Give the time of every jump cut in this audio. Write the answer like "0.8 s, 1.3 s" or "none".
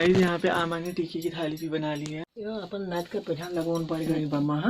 2.3 s